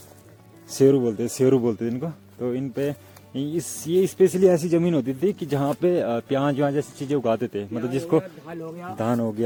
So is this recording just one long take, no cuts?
yes; 0 cuts

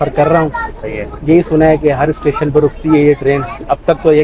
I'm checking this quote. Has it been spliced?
no; 0 cuts

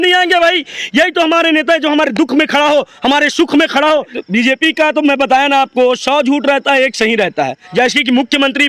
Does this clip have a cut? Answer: yes; 2 cuts; at 4.1 s, 7.6 s

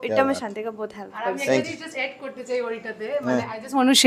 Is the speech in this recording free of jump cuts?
yes; 0 cuts

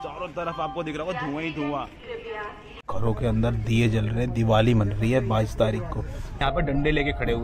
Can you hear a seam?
yes; 2 cuts; at 2.8 s, 6.4 s

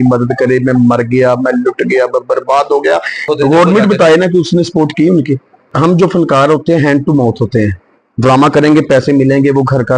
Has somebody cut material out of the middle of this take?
yes; 2 cuts; at 3.2 s, 5.6 s

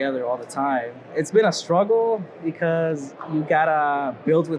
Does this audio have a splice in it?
yes; 2 cuts; at 1.1 s, 3.1 s

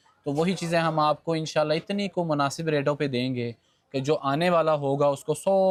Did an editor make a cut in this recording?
no; 0 cuts

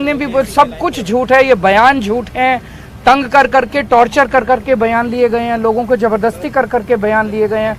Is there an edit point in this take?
no; 0 cuts

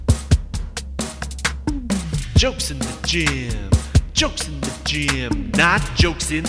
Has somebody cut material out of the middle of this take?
no; 0 cuts

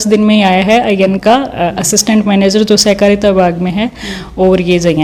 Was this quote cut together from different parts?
no; 0 cuts

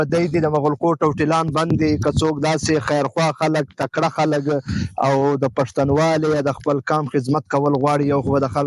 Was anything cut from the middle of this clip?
no; 0 cuts

